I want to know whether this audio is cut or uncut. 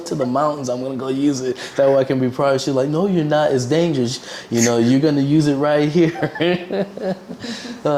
uncut